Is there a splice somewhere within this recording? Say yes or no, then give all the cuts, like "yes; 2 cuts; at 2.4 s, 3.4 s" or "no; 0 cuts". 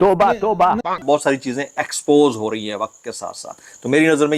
no; 0 cuts